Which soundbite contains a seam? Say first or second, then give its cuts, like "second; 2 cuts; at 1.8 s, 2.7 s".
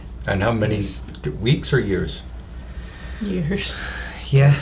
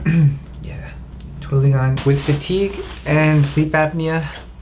second; 1 cut; at 2.0 s